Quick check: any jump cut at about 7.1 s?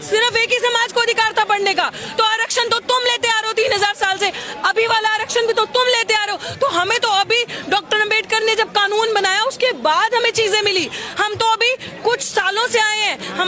no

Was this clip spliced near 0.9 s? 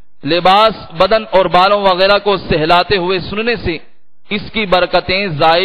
no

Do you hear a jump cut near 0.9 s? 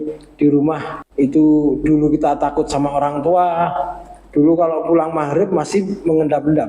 yes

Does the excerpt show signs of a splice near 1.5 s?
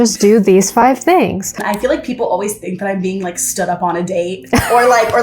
yes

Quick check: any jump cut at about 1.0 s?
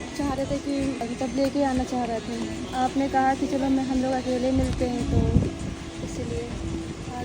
yes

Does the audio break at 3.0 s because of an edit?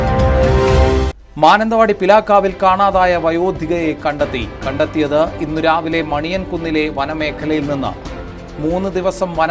no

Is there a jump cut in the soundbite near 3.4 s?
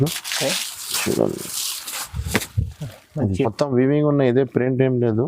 yes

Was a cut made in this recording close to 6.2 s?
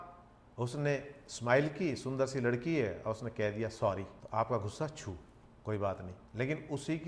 yes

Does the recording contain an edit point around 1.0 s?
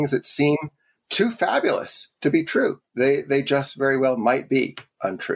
yes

